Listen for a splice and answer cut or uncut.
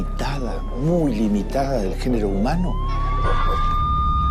cut